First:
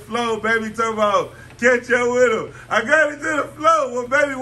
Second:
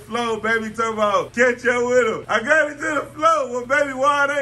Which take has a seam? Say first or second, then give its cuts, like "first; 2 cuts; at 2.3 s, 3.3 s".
second; 2 cuts; at 1.3 s, 2.2 s